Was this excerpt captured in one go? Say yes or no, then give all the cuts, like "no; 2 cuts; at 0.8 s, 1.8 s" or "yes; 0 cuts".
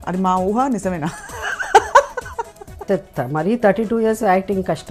no; 1 cut; at 2.8 s